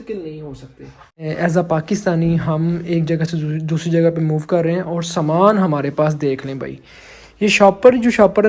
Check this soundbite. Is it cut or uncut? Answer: cut